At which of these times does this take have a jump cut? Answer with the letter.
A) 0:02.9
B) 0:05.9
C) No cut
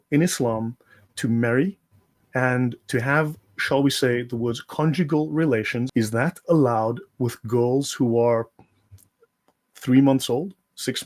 B